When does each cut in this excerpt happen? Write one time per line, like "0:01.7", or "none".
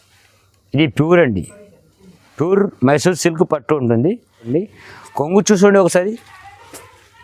0:04.5